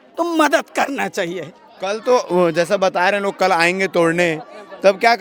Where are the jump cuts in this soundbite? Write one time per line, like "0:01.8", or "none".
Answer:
none